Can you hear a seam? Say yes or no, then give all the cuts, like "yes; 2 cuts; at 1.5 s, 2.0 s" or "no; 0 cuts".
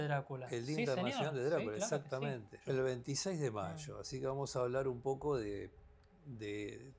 yes; 1 cut; at 2.5 s